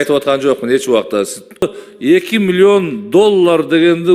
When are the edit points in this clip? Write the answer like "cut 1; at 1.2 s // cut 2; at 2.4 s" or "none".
cut 1; at 1.8 s